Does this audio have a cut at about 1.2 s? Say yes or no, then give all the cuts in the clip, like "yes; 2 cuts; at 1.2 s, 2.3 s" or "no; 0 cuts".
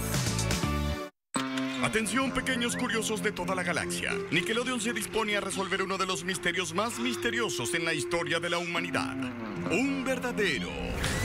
yes; 1 cut; at 1.2 s